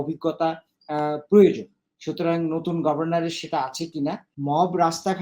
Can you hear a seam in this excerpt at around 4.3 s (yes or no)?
yes